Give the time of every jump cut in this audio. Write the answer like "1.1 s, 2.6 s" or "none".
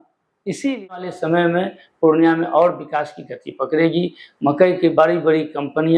1.1 s